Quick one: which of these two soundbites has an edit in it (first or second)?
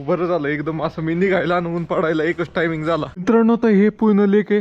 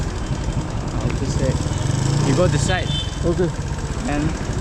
first